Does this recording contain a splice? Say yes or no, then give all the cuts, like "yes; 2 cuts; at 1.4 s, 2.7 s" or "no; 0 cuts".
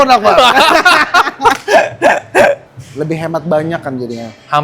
yes; 1 cut; at 2.7 s